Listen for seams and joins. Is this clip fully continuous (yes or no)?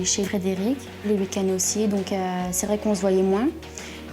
no